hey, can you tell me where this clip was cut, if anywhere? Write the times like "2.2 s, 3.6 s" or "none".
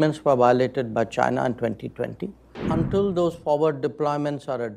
2.5 s